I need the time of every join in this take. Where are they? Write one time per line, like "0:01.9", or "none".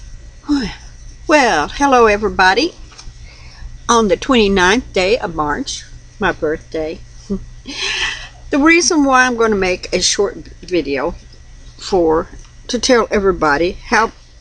none